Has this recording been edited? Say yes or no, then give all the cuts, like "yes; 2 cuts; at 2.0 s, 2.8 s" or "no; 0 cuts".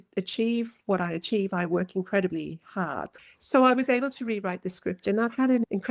yes; 1 cut; at 3.0 s